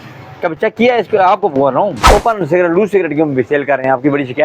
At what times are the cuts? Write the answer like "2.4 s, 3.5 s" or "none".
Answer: 2.1 s